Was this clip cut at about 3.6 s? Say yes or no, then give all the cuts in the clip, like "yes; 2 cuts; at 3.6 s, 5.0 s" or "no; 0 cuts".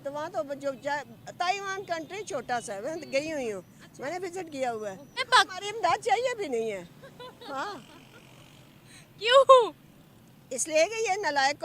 no; 1 cut; at 5.2 s